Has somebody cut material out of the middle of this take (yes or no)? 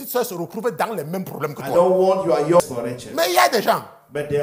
yes